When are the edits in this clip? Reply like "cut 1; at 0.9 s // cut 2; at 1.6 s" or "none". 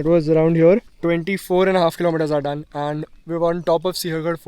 cut 1; at 0.9 s